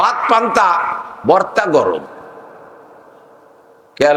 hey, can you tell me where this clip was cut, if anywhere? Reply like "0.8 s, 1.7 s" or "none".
none